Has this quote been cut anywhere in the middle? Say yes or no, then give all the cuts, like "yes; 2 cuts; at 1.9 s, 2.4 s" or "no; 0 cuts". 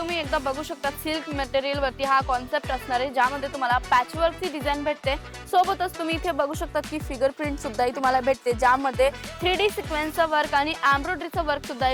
no; 0 cuts